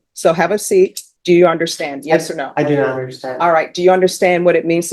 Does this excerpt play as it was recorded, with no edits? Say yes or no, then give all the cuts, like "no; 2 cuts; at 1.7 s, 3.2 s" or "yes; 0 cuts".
no; 1 cut; at 1.1 s